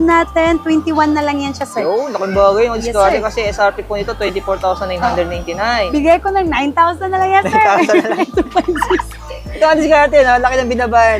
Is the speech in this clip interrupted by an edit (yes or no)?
yes